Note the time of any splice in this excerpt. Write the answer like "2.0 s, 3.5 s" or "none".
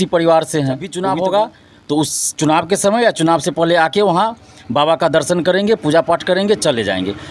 0.9 s